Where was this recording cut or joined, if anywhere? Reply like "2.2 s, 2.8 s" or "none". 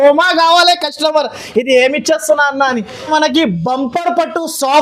2.9 s